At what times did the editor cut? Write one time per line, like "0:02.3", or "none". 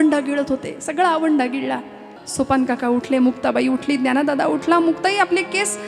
0:02.2